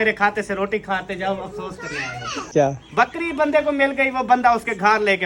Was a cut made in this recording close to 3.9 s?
no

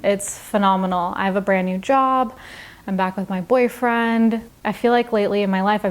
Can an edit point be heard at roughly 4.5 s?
yes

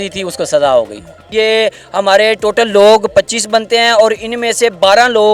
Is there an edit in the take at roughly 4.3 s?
no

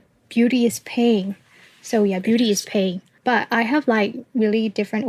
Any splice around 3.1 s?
yes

